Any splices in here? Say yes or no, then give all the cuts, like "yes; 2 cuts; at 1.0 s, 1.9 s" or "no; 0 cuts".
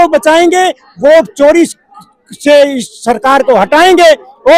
no; 0 cuts